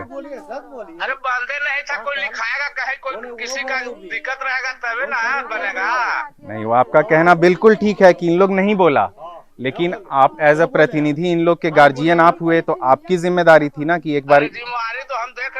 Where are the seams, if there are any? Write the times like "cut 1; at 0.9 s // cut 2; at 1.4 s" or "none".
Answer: none